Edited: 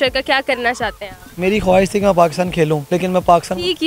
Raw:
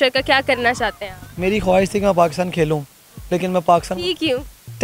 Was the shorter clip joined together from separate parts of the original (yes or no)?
yes